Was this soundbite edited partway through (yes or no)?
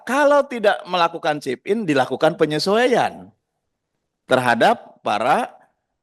no